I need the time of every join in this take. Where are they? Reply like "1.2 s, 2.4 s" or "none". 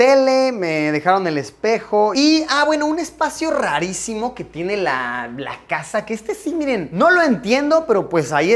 2.1 s